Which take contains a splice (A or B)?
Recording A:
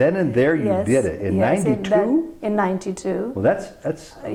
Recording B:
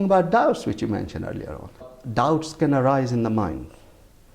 B